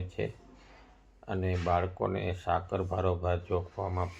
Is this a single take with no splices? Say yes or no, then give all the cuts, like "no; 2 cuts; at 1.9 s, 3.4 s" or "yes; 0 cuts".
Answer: yes; 0 cuts